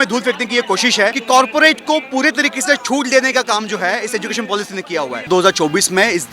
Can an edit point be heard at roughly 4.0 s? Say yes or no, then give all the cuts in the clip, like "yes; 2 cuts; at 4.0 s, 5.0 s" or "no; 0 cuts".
no; 2 cuts; at 1.2 s, 5.3 s